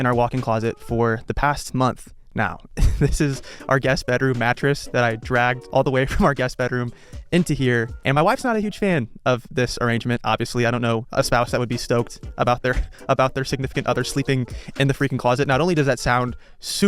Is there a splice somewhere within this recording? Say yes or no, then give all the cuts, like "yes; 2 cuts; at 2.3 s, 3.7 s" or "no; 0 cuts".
no; 0 cuts